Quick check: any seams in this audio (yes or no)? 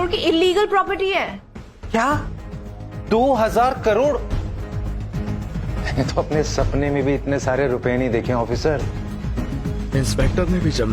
yes